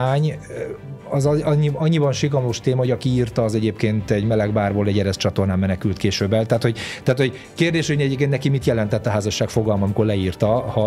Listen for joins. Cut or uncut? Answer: uncut